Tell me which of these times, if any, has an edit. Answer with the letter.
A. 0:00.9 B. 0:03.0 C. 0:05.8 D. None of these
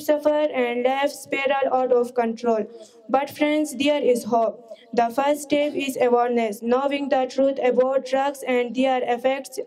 D